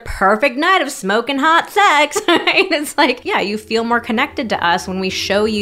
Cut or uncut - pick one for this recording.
cut